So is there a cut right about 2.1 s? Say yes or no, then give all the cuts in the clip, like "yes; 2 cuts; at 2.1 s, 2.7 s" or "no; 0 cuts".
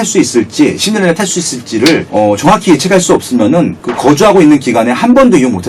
yes; 2 cuts; at 2.1 s, 3.8 s